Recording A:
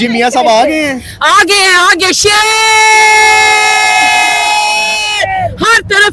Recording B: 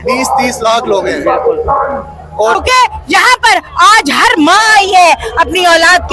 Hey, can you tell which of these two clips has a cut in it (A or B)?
B